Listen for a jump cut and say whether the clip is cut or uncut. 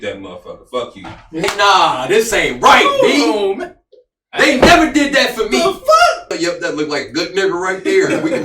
cut